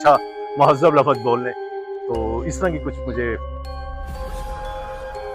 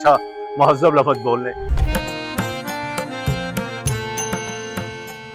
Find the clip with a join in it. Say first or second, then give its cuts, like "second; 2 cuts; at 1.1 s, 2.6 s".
second; 1 cut; at 1.7 s